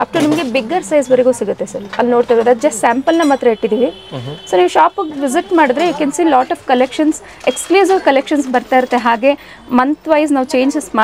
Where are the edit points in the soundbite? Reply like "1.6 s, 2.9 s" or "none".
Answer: none